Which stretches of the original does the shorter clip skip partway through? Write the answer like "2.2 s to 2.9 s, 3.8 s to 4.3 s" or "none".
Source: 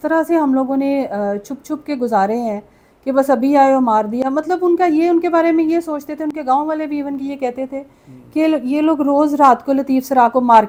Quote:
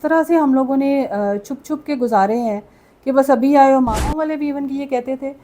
4.1 s to 6.6 s